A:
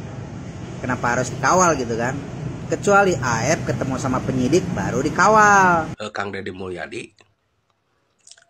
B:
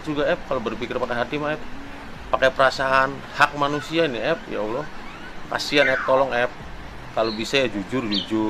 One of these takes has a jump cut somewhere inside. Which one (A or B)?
A